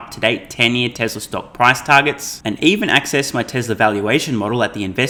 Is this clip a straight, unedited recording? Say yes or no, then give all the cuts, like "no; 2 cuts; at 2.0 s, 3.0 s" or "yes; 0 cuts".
yes; 0 cuts